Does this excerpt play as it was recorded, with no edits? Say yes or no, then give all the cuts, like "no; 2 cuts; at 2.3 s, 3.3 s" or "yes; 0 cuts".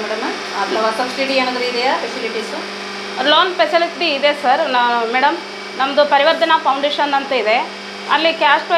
yes; 0 cuts